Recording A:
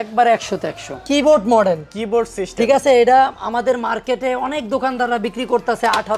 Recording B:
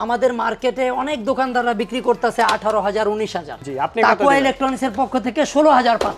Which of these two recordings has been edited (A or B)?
A